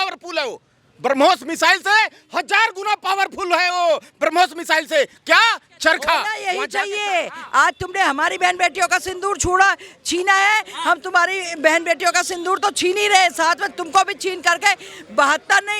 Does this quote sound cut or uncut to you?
cut